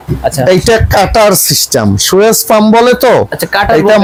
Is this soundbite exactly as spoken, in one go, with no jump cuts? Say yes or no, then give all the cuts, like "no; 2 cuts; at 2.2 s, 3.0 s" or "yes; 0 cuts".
yes; 0 cuts